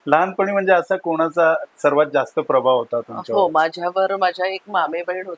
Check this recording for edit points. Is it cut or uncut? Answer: uncut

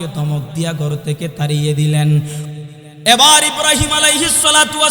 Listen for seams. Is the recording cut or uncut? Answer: cut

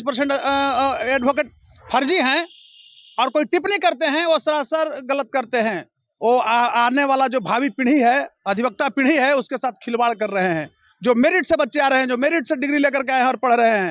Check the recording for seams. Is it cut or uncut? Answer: uncut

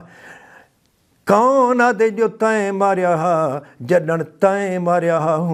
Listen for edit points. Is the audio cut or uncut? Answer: uncut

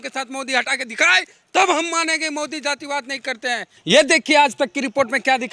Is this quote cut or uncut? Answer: cut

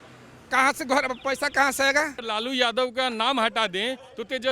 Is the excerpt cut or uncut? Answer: cut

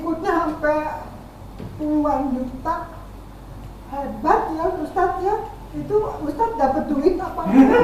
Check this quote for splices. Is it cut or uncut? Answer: uncut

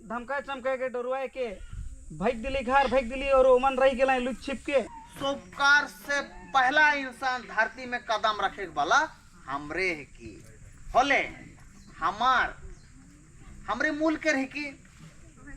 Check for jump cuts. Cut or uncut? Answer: cut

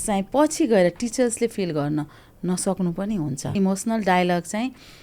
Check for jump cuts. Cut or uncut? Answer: cut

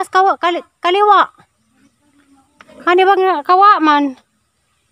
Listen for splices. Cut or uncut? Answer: uncut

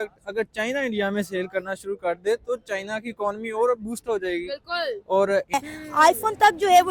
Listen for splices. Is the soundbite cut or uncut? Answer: cut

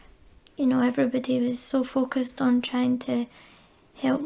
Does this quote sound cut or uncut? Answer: uncut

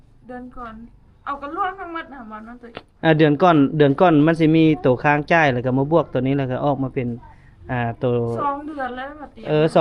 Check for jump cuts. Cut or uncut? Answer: uncut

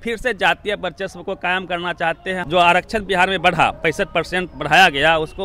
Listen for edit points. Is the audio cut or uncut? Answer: cut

